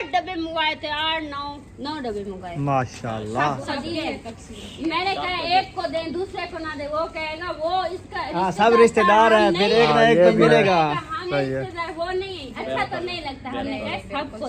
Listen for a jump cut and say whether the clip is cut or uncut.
cut